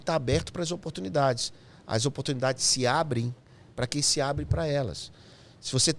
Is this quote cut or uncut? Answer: uncut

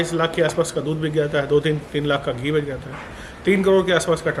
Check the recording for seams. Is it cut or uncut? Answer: uncut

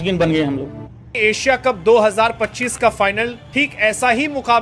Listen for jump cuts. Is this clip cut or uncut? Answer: uncut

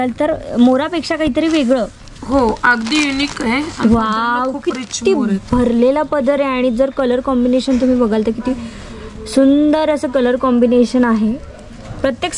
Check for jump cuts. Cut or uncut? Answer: uncut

